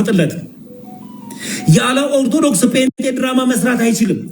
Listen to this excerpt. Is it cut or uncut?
cut